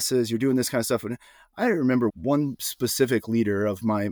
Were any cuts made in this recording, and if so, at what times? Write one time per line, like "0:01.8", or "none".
0:02.1